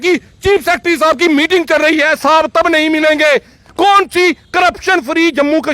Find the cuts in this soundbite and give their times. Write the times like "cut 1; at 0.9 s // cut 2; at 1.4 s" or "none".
cut 1; at 3.6 s